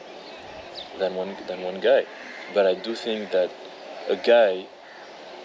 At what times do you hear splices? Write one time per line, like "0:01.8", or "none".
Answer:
none